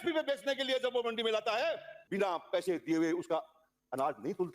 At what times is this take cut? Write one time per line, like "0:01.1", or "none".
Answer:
0:01.9